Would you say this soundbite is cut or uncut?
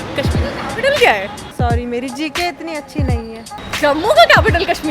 cut